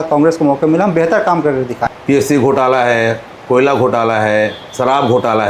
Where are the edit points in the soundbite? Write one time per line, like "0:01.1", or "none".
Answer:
0:01.9